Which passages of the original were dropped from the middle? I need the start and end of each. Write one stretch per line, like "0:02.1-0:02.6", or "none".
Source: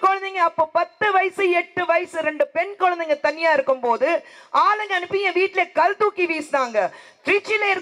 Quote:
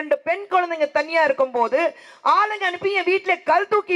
none